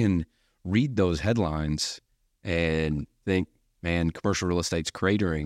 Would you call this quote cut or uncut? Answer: cut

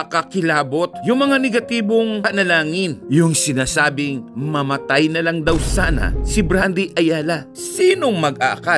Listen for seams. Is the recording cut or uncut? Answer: cut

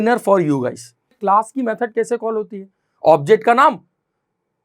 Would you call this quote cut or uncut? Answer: cut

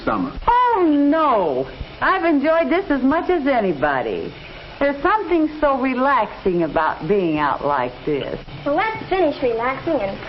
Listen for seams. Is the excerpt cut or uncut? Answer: uncut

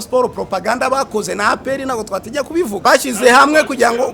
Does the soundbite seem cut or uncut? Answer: cut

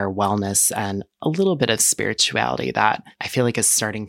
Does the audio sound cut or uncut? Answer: cut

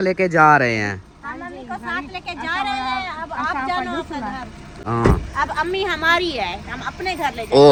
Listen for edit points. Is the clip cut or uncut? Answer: uncut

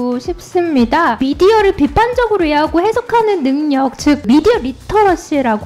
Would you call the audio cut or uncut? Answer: cut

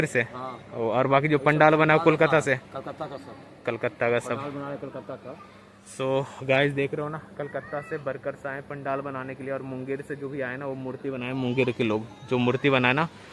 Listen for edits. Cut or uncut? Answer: uncut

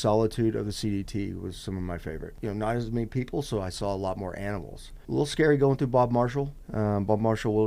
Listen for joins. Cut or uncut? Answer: cut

